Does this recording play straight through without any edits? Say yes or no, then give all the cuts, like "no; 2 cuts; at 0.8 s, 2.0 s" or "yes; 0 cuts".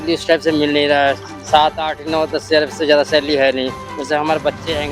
yes; 0 cuts